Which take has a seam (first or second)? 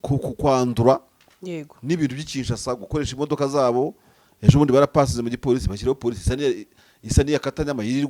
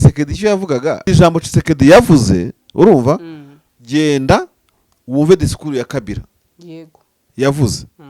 second